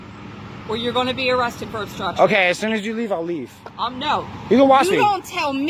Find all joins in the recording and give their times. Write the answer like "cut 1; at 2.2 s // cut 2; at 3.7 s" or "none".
none